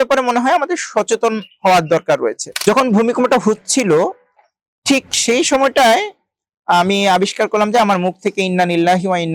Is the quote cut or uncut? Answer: cut